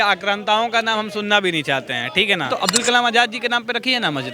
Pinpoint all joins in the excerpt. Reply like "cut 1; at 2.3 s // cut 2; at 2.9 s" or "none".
cut 1; at 2.5 s